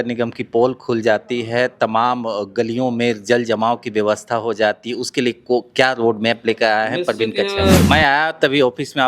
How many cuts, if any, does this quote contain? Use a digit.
1